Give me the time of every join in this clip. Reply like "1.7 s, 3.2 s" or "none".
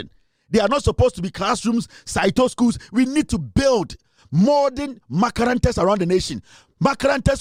none